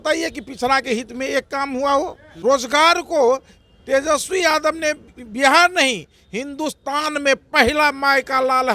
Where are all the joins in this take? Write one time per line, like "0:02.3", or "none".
0:02.2